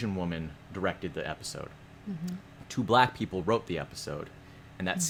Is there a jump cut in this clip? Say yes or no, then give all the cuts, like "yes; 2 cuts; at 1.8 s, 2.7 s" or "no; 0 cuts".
no; 0 cuts